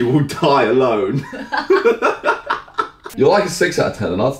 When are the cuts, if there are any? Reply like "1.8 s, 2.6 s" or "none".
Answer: 3.1 s